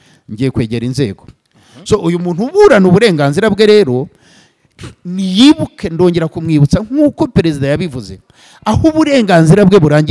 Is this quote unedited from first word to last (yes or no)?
no